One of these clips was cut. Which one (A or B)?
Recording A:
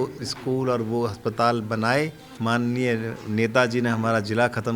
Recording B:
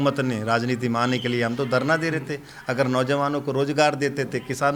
A